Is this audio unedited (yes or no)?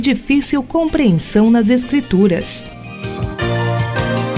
no